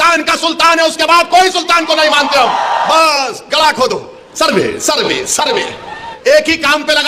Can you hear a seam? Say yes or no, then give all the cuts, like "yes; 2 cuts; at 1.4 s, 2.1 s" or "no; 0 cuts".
yes; 2 cuts; at 2.9 s, 6.1 s